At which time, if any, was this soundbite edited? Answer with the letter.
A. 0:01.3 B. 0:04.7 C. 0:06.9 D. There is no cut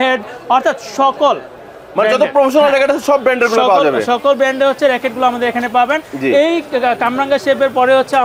D